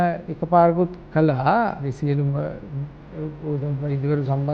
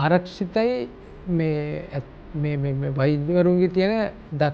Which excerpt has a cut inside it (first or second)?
first